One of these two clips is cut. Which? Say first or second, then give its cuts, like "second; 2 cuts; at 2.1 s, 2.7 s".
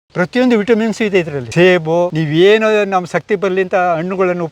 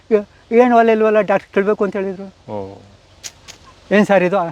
first; 2 cuts; at 1.4 s, 2.2 s